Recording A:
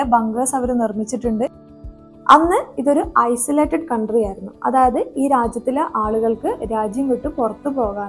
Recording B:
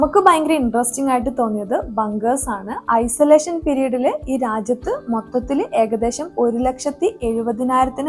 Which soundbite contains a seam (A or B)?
A